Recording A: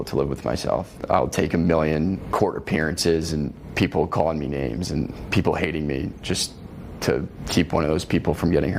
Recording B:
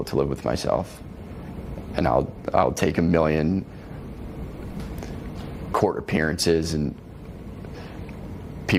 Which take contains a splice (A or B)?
A